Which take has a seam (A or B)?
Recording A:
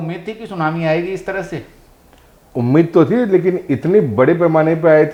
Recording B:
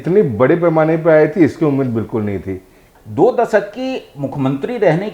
B